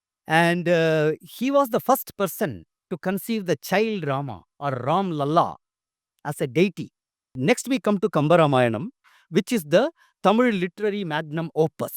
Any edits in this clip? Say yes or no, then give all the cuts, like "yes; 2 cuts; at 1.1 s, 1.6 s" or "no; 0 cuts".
yes; 1 cut; at 7.3 s